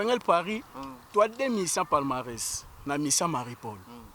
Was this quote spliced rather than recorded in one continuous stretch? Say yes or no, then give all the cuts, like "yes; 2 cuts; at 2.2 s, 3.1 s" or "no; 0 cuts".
no; 0 cuts